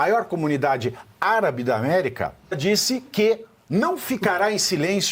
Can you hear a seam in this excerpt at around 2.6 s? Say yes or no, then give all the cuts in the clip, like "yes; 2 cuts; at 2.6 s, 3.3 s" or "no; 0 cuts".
yes; 1 cut; at 2.6 s